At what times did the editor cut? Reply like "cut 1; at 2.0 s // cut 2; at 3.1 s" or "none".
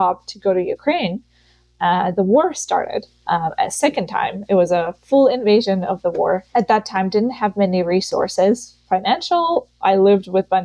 cut 1; at 3.2 s // cut 2; at 6.5 s